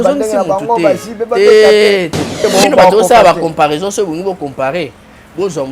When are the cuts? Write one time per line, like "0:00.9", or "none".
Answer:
0:02.4